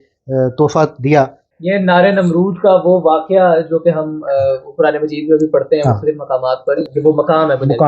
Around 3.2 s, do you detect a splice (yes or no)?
no